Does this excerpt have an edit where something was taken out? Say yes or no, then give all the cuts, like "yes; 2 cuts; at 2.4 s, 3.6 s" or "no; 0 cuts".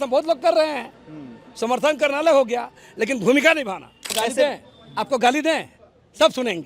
yes; 1 cut; at 4.0 s